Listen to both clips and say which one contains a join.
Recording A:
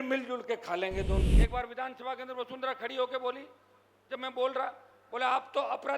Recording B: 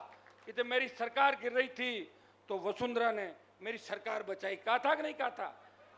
A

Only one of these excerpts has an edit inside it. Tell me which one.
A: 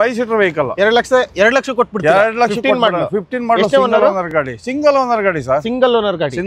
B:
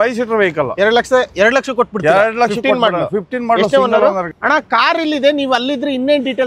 B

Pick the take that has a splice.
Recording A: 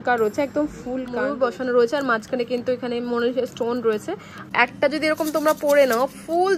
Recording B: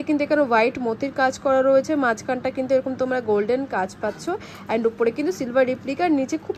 A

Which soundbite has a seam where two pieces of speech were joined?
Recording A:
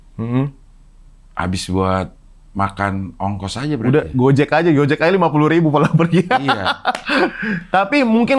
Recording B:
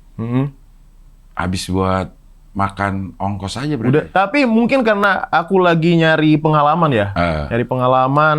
B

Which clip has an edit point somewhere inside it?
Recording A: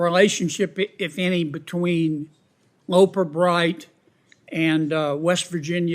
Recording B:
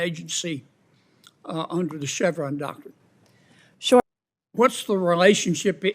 B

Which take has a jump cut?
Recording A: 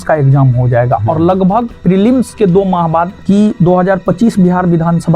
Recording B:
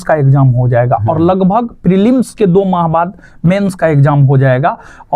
A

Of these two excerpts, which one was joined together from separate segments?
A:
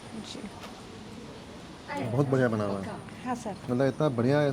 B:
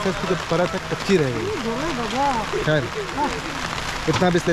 A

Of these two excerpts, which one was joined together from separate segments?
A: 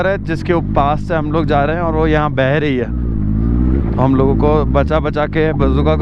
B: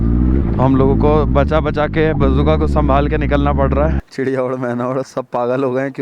B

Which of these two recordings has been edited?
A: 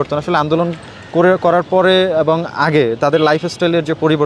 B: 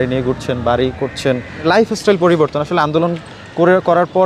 B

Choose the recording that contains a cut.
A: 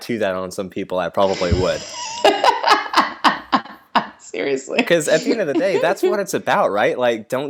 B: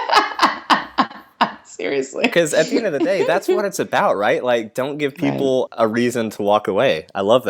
B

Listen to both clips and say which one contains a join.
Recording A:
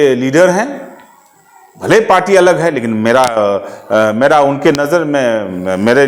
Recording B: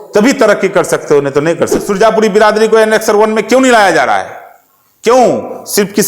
B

